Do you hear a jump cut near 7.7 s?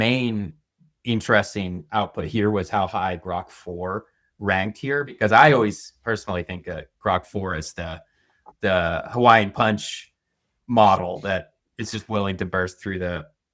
no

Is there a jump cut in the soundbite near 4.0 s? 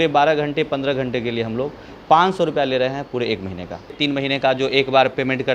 yes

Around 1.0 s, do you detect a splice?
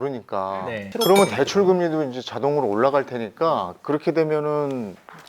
yes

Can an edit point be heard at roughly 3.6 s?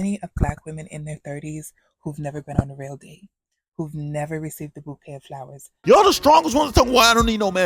no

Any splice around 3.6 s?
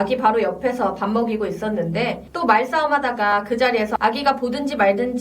no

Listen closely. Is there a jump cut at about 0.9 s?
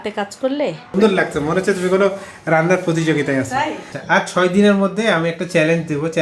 yes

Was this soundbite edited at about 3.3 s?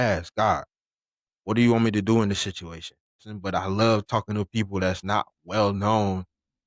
yes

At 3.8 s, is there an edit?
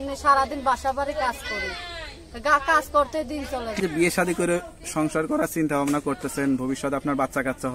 yes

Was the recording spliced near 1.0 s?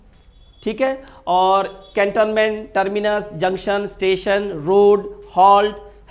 no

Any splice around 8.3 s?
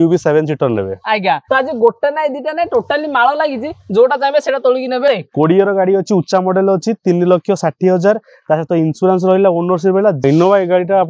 no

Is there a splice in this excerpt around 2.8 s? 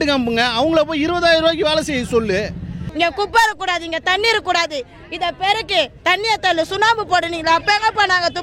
yes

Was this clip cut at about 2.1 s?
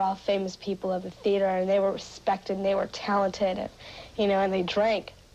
no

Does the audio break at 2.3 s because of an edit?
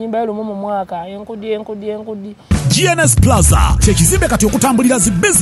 yes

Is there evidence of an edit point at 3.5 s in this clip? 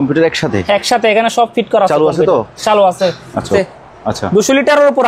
yes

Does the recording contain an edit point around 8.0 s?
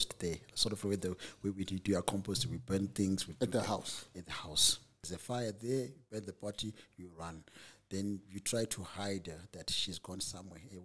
no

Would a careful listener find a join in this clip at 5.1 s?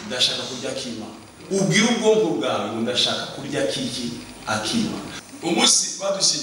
yes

